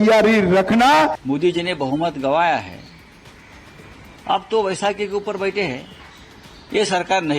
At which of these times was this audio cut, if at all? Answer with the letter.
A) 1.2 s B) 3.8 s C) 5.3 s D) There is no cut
A